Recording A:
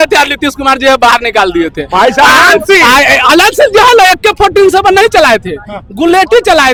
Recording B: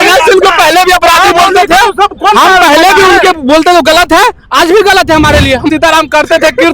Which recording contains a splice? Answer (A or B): B